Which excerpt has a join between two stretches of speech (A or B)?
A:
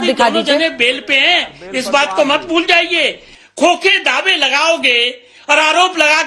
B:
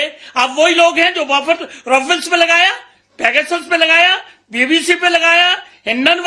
A